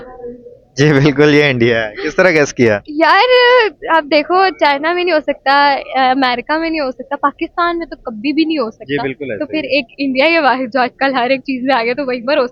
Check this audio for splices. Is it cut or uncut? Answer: uncut